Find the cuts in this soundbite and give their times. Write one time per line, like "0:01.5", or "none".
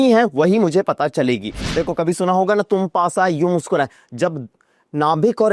0:01.6